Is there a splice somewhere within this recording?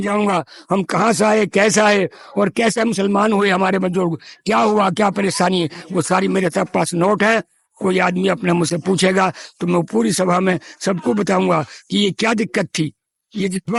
no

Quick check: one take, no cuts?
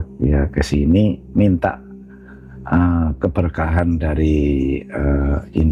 yes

